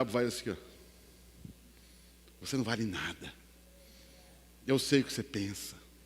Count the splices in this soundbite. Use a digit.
1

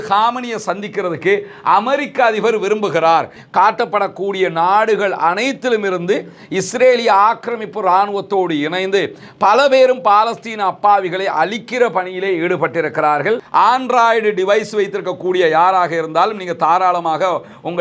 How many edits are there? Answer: 2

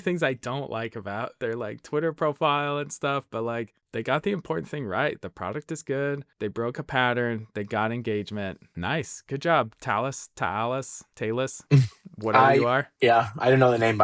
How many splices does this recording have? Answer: 2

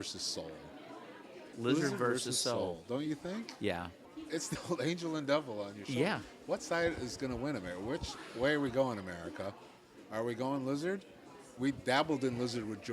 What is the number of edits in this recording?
1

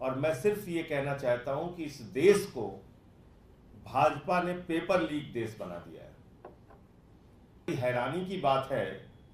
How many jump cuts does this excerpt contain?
1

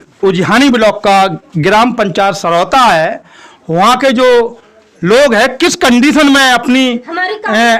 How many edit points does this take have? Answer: 0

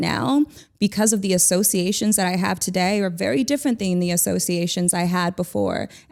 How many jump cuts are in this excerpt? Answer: 0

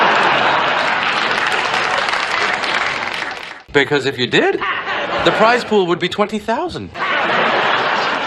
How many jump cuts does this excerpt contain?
0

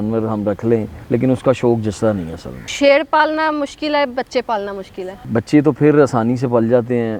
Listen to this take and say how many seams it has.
3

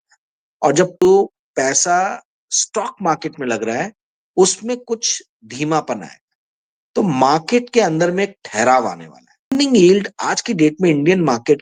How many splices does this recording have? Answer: 2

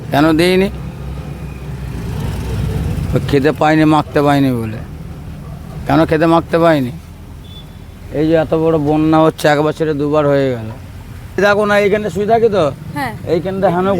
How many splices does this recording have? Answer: 1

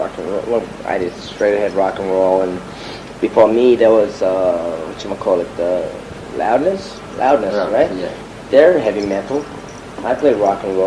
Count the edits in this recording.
1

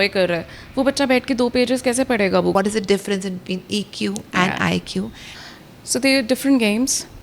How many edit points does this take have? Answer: 2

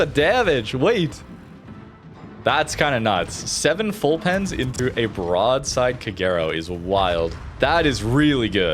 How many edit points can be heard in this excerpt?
1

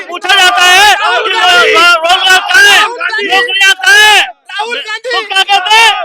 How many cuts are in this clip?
0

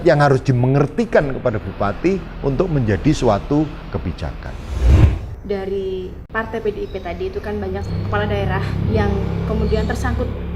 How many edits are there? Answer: 1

